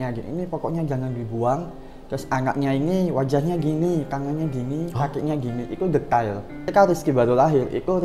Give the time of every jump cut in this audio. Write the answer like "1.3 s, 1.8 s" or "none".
6.7 s